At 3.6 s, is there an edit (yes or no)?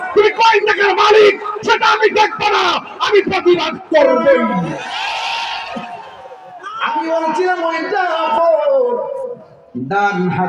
no